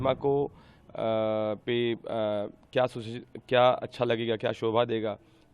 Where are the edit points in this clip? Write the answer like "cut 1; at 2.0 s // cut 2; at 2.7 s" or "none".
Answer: none